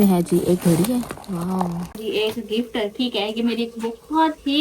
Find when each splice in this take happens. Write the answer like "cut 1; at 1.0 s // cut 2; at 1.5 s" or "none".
cut 1; at 2.0 s